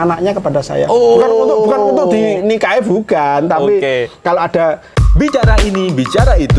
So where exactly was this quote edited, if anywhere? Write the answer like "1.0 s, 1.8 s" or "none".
5.0 s